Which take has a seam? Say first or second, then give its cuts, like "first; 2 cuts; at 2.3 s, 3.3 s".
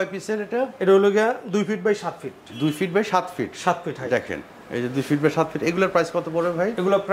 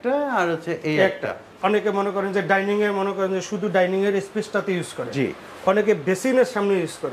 second; 1 cut; at 1.5 s